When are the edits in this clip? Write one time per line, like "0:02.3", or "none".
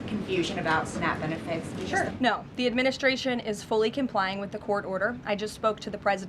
0:02.1